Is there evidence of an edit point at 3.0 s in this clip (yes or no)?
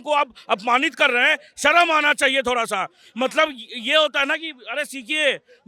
no